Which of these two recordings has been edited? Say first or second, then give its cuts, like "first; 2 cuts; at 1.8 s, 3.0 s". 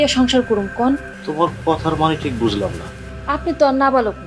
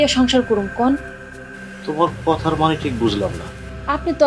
first; 1 cut; at 1.2 s